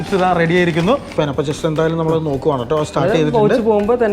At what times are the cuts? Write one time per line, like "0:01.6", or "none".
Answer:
0:01.1